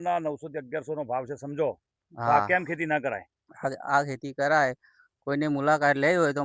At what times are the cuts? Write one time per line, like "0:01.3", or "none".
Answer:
none